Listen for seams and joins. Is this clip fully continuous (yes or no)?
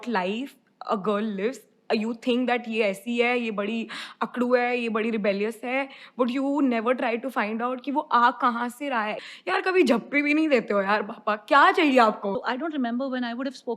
no